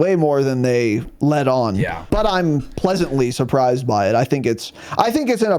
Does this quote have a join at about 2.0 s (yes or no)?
yes